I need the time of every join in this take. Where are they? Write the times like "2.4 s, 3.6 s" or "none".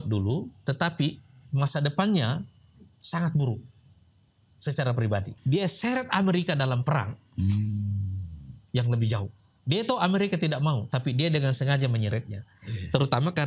5.3 s

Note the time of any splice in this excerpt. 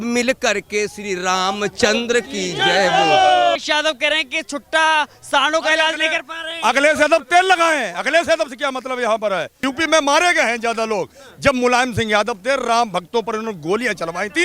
3.6 s, 9.5 s

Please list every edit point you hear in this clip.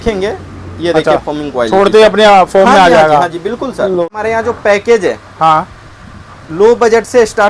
4.0 s

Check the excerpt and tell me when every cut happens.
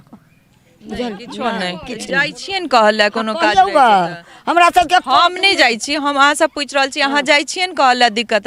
none

